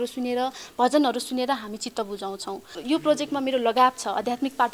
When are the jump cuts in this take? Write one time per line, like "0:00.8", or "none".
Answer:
0:02.8

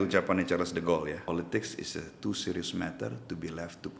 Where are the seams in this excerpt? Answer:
0:01.3

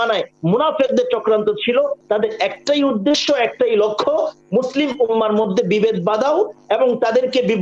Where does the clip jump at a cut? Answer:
0:02.0

